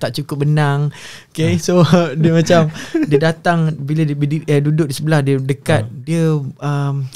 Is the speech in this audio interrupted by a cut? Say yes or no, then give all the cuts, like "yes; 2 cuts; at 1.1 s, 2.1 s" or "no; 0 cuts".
no; 0 cuts